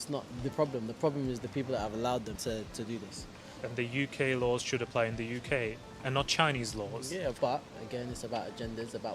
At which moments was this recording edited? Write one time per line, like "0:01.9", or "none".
0:02.4
0:03.4
0:07.4

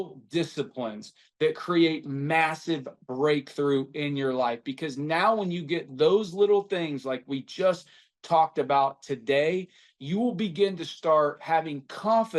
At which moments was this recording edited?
0:01.2

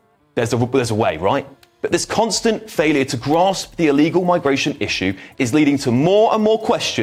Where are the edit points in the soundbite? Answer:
none

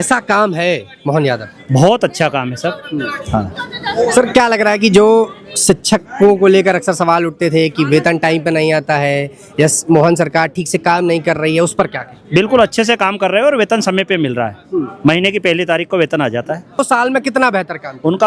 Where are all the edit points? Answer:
0:16.8

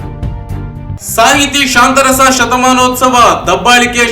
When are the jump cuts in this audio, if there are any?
0:00.9

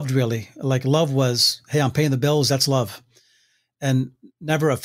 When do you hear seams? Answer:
none

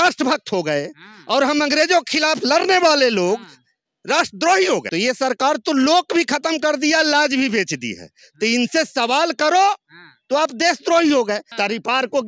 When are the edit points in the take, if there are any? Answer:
0:04.9
0:11.5

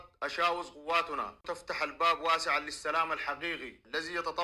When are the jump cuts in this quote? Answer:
0:01.4

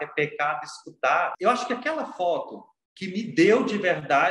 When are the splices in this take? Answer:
0:01.4

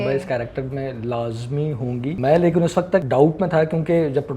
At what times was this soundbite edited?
0:02.2
0:03.1

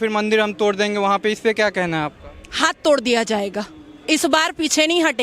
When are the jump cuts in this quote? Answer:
none

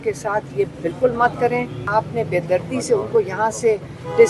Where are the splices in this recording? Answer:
0:01.8

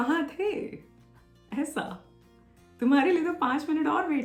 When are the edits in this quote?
none

